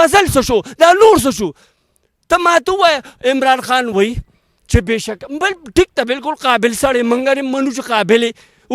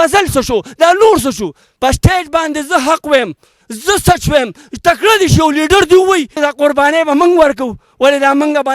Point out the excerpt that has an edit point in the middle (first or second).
second